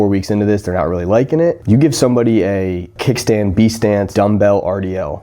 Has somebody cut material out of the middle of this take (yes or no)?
yes